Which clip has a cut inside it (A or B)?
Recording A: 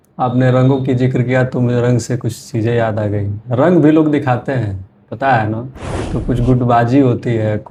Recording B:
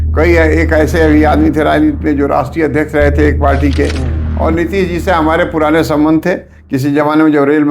B